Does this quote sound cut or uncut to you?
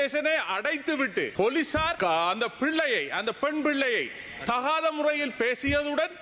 cut